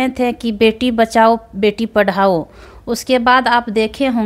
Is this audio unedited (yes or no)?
yes